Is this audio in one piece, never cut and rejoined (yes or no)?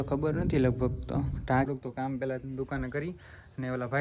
no